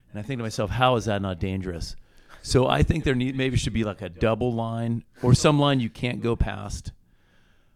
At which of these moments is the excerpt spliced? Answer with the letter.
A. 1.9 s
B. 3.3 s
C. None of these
C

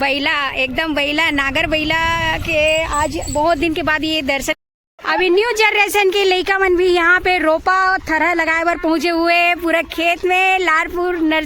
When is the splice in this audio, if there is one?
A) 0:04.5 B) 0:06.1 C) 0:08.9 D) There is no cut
A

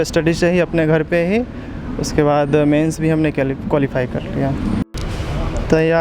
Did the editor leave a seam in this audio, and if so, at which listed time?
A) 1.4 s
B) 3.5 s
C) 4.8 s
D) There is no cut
C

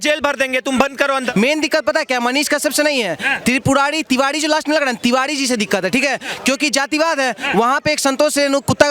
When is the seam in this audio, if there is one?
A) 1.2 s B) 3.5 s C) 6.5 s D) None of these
A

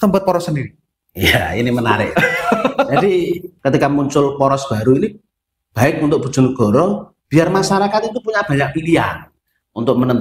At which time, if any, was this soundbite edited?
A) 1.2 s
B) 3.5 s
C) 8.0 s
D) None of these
B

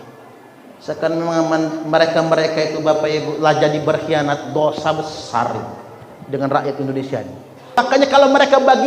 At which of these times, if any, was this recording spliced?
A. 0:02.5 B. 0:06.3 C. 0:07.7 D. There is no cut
C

